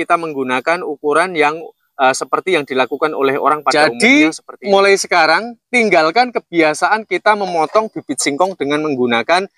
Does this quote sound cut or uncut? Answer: cut